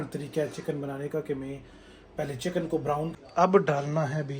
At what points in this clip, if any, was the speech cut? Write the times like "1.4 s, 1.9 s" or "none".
3.1 s